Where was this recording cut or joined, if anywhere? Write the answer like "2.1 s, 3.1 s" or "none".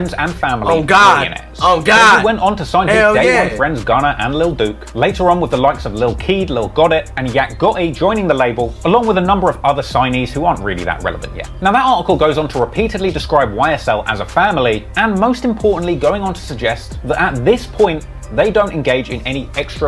none

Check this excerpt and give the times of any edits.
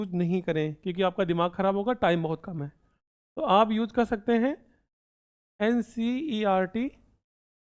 none

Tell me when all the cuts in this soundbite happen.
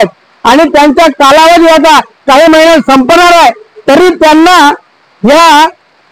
none

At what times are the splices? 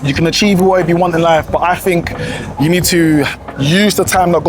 none

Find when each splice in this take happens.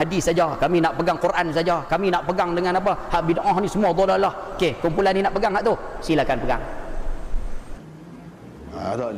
7.7 s

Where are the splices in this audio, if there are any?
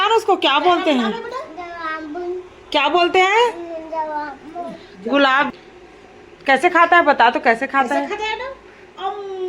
5.5 s

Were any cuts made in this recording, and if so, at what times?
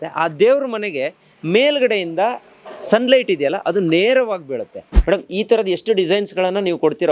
4.9 s

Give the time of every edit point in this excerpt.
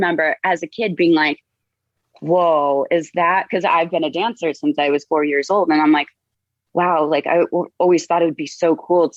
none

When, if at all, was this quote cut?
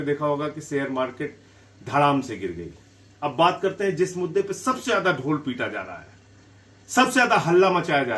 none

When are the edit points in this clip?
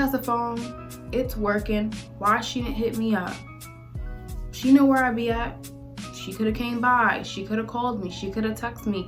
none

